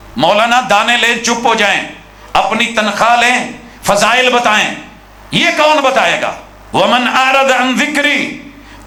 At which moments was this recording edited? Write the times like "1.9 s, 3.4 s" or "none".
none